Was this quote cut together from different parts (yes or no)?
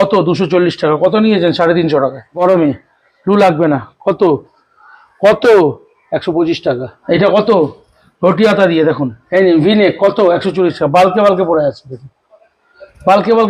yes